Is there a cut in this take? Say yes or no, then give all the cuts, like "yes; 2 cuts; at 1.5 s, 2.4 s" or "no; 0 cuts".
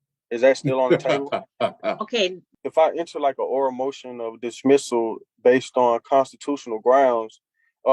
yes; 1 cut; at 2.5 s